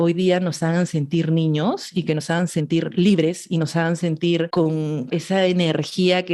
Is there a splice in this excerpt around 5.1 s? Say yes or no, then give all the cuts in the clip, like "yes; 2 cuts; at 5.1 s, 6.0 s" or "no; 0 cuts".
yes; 1 cut; at 5.1 s